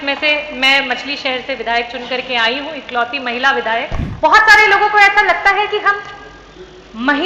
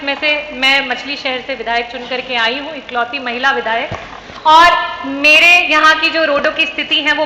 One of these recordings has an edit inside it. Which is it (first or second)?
first